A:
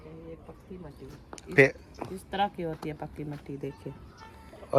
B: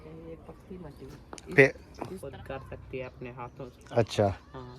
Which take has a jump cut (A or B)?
B